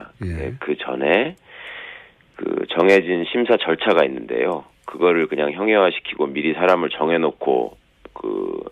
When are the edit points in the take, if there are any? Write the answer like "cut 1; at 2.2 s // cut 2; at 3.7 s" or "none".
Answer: cut 1; at 5.4 s